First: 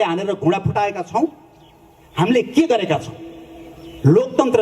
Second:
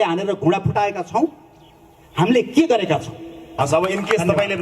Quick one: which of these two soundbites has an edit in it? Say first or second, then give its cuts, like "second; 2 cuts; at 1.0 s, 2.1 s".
second; 1 cut; at 3.4 s